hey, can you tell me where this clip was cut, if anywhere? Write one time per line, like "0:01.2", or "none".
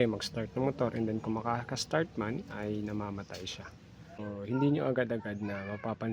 0:04.2